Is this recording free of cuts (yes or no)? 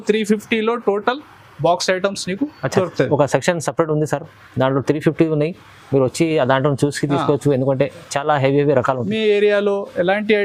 yes